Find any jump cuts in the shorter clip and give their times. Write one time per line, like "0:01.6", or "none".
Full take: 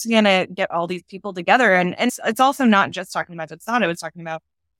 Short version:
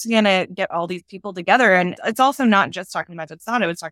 0:02.0